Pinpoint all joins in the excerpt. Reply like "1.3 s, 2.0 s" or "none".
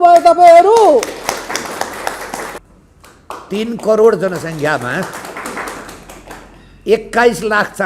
2.6 s